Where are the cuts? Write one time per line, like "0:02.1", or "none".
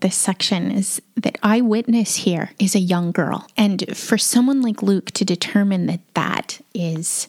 0:02.5